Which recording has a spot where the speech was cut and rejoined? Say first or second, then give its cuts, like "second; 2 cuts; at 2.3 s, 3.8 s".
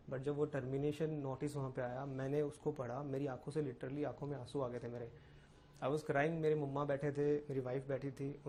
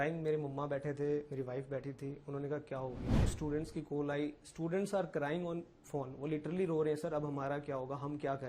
second; 1 cut; at 3.3 s